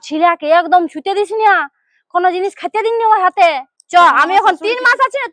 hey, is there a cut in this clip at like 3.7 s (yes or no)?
yes